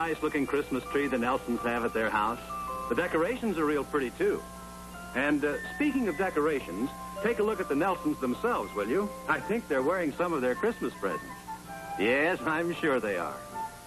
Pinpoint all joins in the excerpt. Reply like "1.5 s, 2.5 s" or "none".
11.7 s